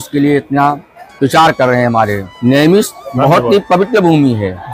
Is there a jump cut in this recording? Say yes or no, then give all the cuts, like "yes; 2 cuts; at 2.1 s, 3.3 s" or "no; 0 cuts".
no; 0 cuts